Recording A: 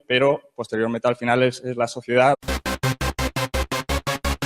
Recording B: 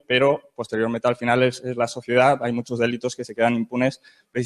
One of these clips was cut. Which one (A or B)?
B